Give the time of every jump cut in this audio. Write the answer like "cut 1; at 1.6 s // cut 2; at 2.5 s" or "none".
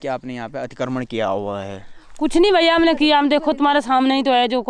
none